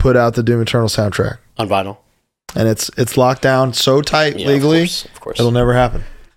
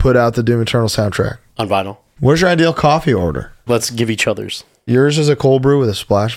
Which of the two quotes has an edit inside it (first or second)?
second